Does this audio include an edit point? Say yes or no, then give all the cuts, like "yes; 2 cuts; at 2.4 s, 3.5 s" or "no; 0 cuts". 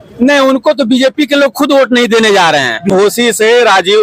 yes; 1 cut; at 2.9 s